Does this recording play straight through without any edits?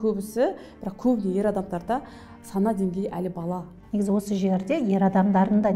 no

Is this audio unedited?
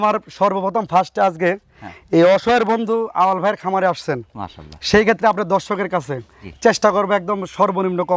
yes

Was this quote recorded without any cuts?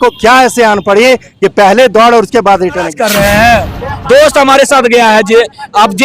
no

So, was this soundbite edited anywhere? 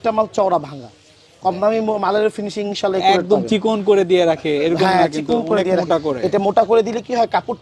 no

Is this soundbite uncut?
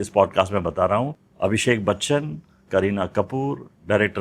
no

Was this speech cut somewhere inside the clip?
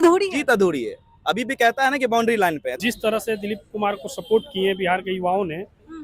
yes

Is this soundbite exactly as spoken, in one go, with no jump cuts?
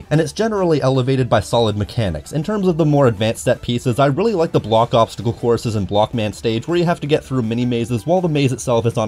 yes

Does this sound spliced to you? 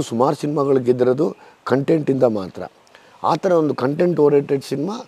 no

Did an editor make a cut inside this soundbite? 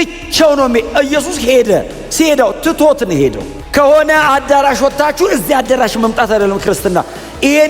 yes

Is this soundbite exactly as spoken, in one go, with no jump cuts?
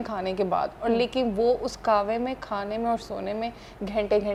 yes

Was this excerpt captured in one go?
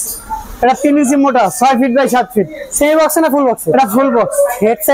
yes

